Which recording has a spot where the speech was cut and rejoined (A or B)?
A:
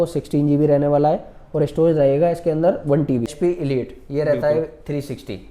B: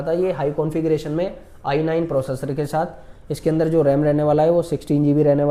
A